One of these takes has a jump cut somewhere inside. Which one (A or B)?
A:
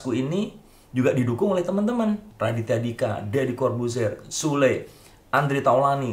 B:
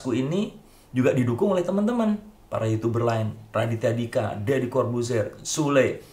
A